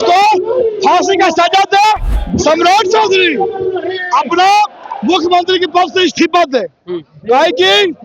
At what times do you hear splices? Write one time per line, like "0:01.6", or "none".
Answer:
0:02.2